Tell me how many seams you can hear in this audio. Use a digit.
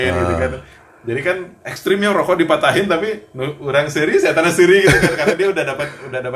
0